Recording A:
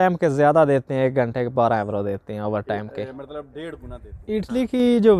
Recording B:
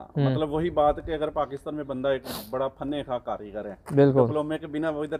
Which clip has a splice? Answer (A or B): A